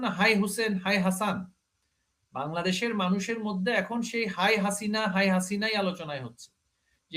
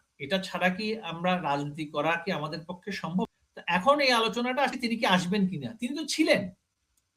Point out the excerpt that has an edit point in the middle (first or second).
second